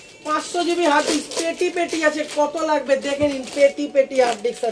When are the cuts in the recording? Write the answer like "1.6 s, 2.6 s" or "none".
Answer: none